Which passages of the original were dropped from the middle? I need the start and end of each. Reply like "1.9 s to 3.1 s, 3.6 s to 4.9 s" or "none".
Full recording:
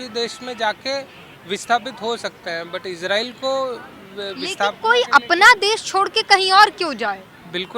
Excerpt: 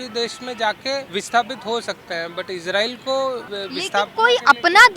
1.1 s to 1.4 s, 3.9 s to 4.2 s